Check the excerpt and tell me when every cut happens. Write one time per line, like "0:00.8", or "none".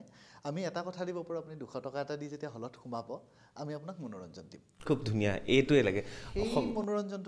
none